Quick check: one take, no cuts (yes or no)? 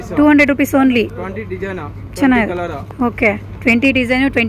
yes